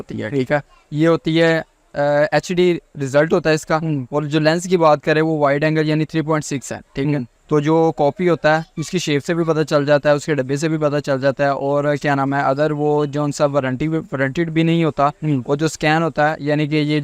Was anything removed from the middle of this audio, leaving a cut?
yes; 1 cut; at 7.3 s

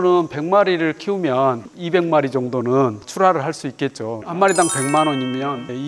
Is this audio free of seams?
yes; 0 cuts

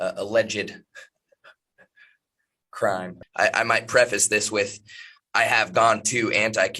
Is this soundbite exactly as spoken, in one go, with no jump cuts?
no; 1 cut; at 3.2 s

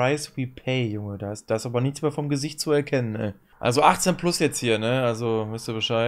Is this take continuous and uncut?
no; 1 cut; at 3.5 s

